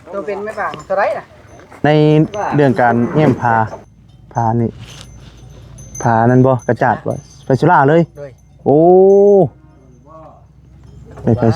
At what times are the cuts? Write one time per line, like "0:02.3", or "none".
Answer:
0:01.8